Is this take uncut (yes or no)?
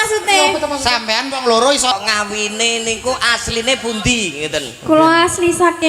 no